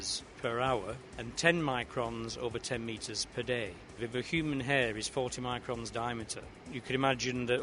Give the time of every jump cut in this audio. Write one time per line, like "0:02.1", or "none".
0:03.9